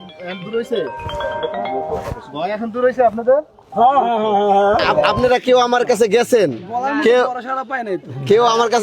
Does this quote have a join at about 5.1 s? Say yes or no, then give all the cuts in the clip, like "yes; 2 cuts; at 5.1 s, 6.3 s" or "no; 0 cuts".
yes; 1 cut; at 5.1 s